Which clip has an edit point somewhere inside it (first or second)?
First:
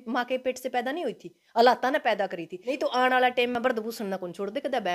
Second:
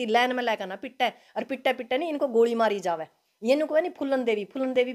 first